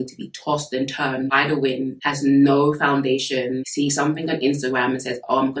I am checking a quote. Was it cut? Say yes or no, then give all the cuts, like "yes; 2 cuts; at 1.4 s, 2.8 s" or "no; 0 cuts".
no; 0 cuts